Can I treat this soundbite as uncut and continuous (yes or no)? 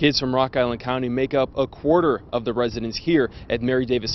yes